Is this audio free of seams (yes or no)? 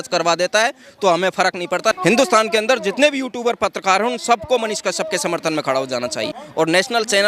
no